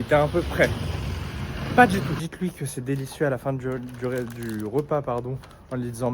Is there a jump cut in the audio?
yes; 1 cut; at 2.2 s

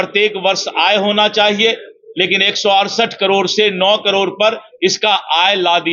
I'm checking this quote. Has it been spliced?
no; 0 cuts

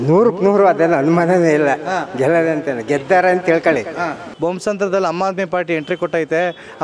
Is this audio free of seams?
no; 1 cut; at 4.3 s

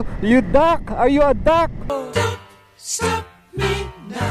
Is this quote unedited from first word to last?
no; 1 cut; at 1.9 s

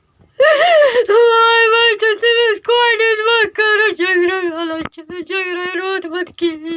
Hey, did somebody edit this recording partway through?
no; 0 cuts

